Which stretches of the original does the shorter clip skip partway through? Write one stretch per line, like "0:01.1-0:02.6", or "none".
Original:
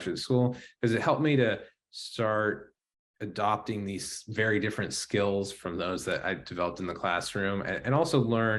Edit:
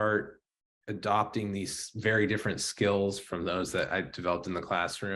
none